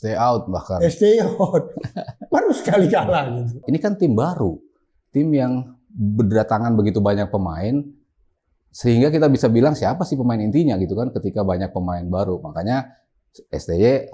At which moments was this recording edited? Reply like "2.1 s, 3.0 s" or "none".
3.6 s